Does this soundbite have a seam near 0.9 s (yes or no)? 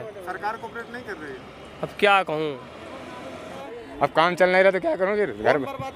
no